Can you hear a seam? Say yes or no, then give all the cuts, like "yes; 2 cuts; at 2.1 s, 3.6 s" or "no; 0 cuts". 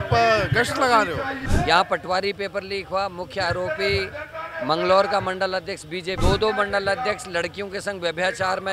yes; 2 cuts; at 1.4 s, 6.2 s